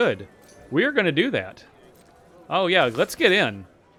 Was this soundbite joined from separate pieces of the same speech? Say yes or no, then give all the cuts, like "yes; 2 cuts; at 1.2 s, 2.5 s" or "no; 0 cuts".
no; 0 cuts